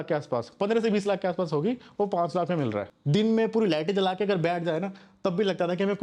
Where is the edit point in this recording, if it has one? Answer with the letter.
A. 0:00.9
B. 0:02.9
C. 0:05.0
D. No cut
B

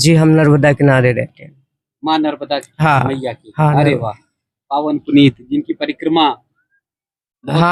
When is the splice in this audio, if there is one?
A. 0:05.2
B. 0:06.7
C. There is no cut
C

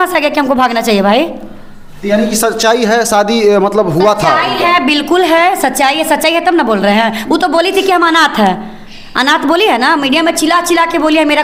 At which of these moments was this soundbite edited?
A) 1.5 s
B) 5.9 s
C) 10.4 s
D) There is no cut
D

